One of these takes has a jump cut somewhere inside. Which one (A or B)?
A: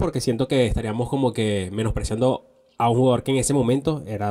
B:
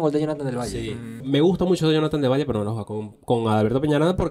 B